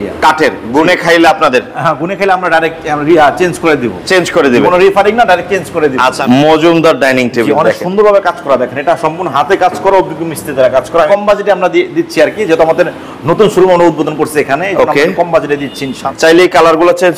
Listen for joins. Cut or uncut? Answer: cut